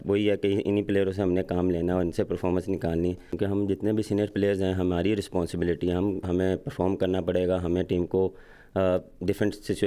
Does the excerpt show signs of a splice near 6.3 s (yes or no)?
yes